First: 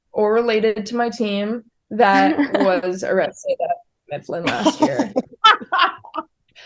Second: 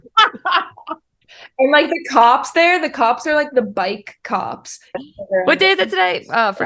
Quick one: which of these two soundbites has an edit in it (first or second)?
second